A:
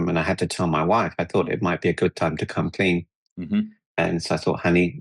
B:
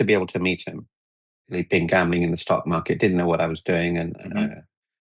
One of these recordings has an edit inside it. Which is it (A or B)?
B